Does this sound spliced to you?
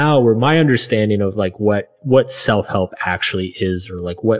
no; 0 cuts

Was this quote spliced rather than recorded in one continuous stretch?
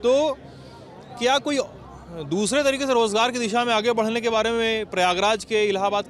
no; 0 cuts

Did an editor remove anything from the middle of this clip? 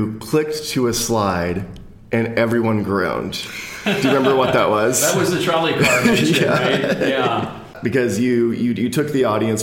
yes; 1 cut; at 7.7 s

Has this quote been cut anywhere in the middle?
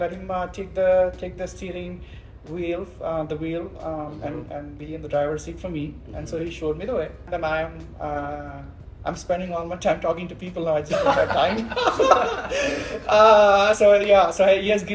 yes; 1 cut; at 7.2 s

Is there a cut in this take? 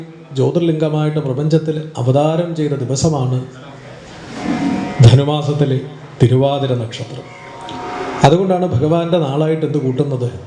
no; 0 cuts

